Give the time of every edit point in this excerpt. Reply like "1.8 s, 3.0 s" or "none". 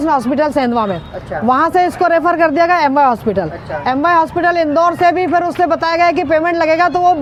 none